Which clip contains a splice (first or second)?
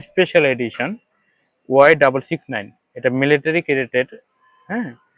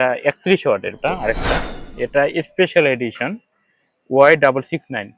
second